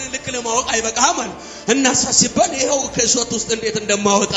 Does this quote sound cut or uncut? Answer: uncut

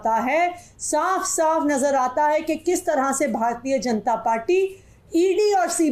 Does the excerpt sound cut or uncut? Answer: uncut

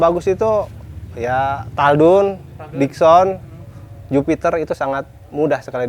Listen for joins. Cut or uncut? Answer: uncut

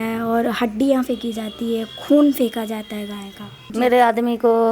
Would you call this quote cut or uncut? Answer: uncut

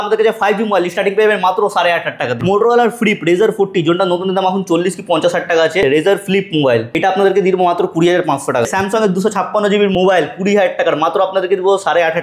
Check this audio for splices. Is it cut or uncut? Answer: cut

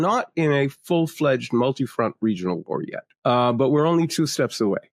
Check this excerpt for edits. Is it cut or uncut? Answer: cut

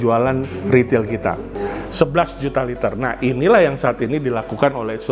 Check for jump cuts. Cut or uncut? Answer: cut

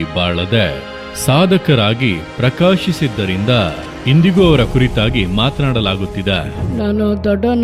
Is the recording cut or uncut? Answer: cut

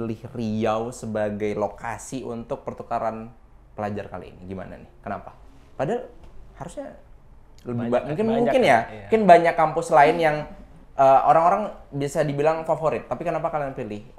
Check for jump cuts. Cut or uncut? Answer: uncut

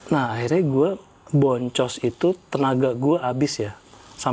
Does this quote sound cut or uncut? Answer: uncut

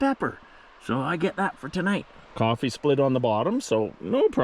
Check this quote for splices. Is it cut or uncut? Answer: cut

